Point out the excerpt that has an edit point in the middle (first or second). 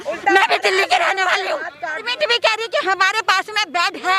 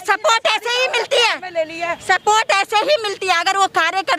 first